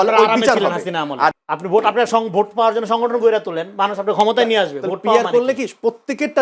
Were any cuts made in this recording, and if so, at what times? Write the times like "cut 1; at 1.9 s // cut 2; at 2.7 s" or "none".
cut 1; at 1.4 s